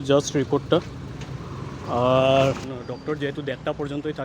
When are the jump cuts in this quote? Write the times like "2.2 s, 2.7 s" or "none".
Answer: 2.7 s